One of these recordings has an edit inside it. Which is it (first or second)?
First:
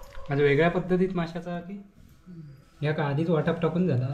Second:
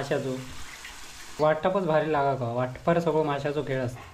second